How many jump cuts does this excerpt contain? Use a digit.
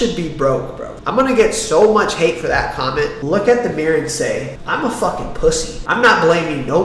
1